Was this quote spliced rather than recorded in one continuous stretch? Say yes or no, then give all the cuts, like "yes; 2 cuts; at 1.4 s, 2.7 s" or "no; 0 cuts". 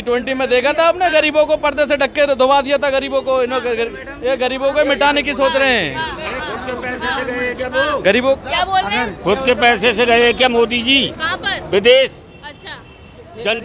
no; 0 cuts